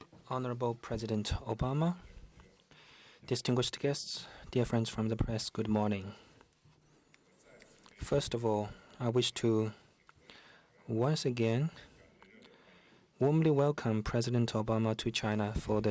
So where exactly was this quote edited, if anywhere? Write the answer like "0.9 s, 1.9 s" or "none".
none